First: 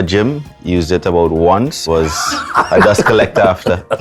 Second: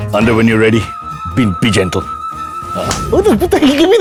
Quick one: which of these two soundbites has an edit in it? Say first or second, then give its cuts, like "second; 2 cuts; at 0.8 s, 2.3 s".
first; 1 cut; at 1.8 s